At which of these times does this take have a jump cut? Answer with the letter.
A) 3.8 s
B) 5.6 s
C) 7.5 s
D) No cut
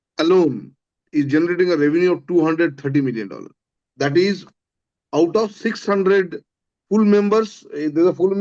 A